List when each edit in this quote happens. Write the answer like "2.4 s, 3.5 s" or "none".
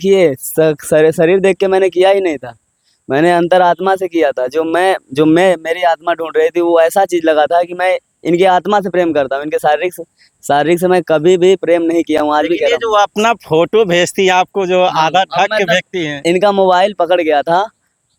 none